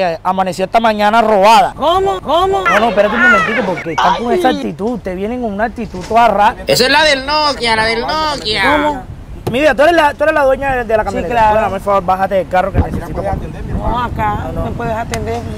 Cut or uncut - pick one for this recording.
uncut